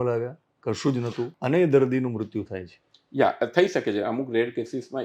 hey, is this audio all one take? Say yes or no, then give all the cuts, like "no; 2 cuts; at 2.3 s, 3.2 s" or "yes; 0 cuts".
no; 1 cut; at 1.3 s